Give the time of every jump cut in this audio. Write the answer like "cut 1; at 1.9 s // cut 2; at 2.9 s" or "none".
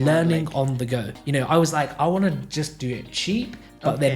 cut 1; at 1.1 s